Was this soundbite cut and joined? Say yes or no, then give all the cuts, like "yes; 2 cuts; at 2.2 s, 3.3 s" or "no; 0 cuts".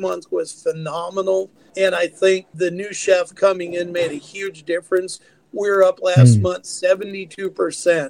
yes; 2 cuts; at 1.6 s, 2.5 s